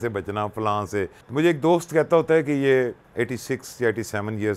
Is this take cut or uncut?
cut